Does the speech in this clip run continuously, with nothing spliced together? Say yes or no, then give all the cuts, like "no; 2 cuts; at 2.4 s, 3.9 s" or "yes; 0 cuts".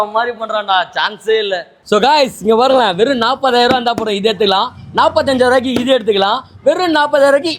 yes; 0 cuts